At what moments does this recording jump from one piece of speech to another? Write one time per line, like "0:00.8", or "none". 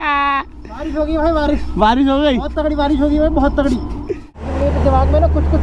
0:04.4